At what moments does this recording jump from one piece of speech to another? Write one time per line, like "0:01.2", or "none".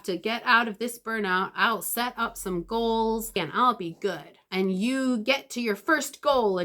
0:03.4